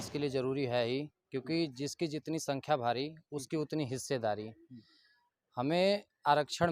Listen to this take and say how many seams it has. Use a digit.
0